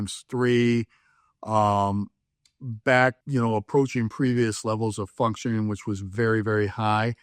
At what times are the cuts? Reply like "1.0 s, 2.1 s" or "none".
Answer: 3.2 s